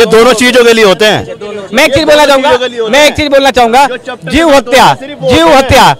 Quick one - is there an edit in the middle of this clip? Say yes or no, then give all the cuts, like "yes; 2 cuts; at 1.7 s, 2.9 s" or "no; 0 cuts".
no; 0 cuts